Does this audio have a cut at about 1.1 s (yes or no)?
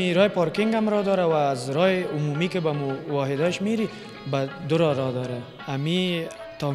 no